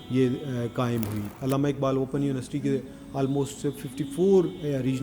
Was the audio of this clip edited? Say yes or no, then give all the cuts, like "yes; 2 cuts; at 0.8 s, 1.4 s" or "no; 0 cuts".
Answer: yes; 1 cut; at 1.2 s